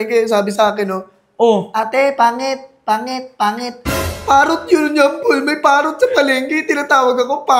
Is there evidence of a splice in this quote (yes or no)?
no